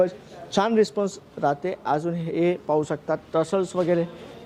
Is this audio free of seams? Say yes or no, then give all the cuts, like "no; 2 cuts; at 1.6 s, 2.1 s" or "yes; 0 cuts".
yes; 0 cuts